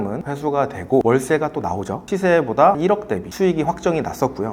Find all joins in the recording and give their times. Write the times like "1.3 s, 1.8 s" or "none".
2.1 s